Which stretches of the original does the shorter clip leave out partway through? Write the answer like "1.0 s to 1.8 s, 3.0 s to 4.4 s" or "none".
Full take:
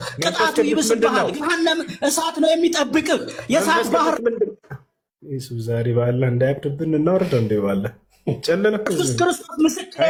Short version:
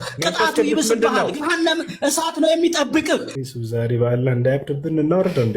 3.3 s to 5.3 s